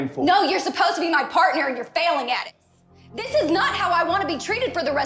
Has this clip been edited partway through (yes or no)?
yes